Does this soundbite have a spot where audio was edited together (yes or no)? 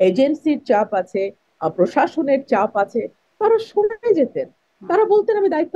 no